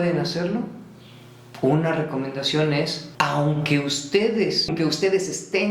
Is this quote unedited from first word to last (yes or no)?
no